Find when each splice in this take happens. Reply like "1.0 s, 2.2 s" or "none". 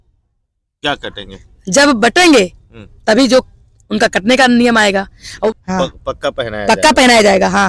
5.5 s